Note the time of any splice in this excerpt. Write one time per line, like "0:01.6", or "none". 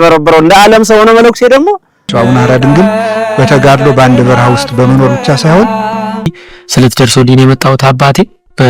0:02.1
0:06.2